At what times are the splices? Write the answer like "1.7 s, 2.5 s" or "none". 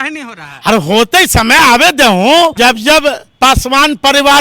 2.5 s